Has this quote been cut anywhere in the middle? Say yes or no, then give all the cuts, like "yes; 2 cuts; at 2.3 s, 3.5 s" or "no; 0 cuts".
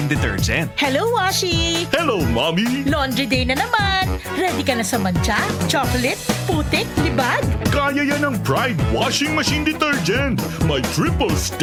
no; 0 cuts